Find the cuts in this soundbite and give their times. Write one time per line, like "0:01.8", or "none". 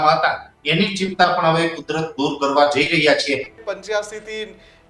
0:03.6